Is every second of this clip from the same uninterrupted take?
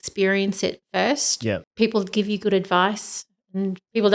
no; 1 cut; at 1.6 s

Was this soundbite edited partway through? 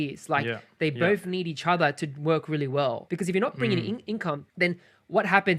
yes; 2 cuts; at 3.0 s, 4.5 s

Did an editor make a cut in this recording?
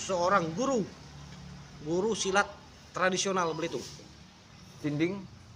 no; 0 cuts

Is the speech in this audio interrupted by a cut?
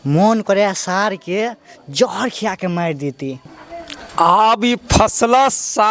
yes; 1 cut; at 3.4 s

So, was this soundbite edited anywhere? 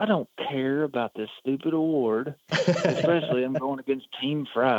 no; 0 cuts

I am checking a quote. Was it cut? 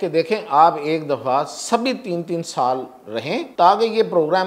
yes; 1 cut; at 3.5 s

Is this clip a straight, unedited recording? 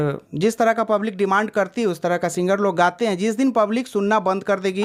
yes; 0 cuts

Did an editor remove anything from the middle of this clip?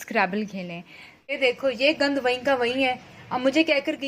yes; 1 cut; at 1.3 s

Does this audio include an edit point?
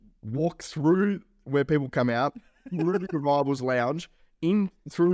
no; 0 cuts

